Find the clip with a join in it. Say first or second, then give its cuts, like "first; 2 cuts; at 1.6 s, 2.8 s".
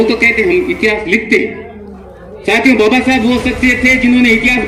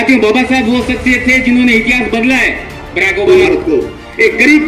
second; 1 cut; at 3.3 s